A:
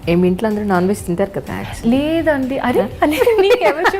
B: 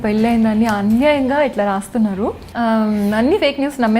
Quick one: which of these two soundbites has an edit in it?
B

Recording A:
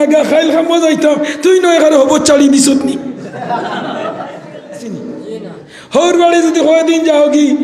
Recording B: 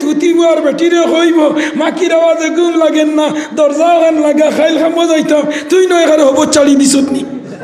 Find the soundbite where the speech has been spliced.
A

